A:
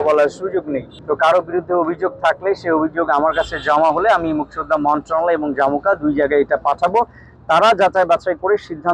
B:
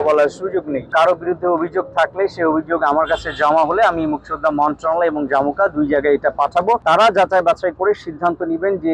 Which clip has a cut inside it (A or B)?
B